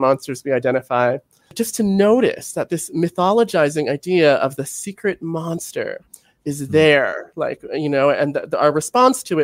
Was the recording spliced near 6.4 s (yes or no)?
no